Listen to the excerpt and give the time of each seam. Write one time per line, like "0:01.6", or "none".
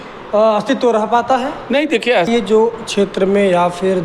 0:02.3